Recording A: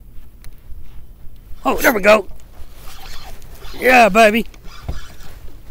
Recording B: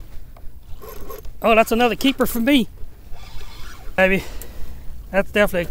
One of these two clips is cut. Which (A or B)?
B